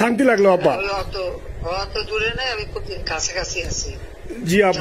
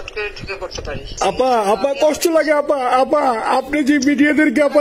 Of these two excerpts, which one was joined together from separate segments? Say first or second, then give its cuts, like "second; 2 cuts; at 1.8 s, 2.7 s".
second; 1 cut; at 1.0 s